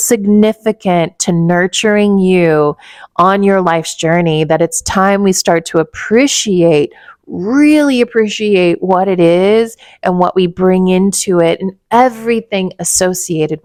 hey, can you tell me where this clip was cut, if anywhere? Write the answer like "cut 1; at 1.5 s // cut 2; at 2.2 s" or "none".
none